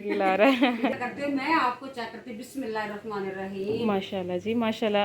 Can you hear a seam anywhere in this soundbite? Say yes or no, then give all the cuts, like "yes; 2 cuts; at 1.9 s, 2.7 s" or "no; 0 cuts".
yes; 1 cut; at 0.9 s